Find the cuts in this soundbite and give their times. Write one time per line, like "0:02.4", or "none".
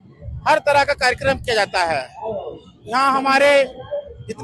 none